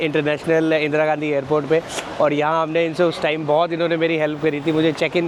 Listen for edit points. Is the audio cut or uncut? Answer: uncut